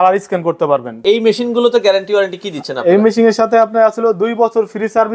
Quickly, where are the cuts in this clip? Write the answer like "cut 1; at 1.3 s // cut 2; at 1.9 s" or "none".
cut 1; at 1.0 s